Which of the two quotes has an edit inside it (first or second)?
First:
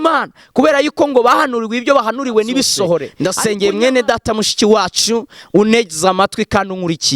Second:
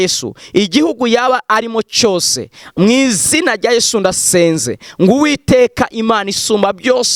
first